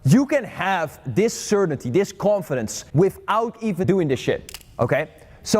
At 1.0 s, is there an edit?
no; 3 cuts; at 2.8 s, 3.8 s, 4.6 s

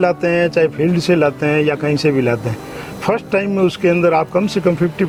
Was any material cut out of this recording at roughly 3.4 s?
no; 0 cuts

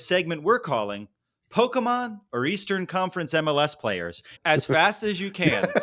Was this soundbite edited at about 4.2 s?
yes; 1 cut; at 4.2 s

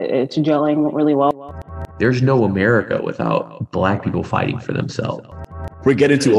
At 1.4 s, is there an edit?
yes; 3 cuts; at 1.4 s, 3.6 s, 5.5 s

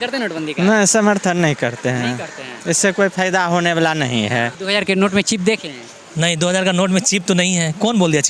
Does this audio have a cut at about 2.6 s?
no; 1 cut; at 4.6 s

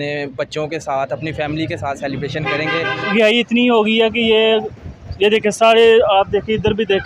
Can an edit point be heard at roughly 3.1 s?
yes; 1 cut; at 3.1 s

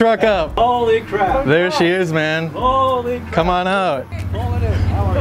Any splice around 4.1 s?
yes; 1 cut; at 4.1 s

